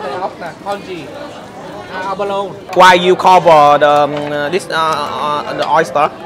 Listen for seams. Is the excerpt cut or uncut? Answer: cut